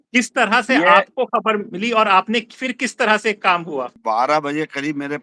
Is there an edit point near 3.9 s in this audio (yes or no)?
yes